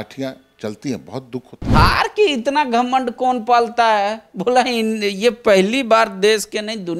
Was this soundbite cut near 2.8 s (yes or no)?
no